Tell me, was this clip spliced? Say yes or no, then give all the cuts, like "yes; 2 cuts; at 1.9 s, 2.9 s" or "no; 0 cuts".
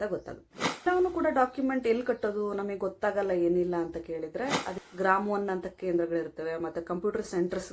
yes; 2 cuts; at 0.8 s, 4.7 s